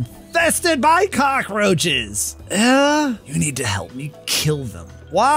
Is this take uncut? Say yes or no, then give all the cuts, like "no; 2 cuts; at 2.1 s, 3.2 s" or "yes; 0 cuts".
yes; 0 cuts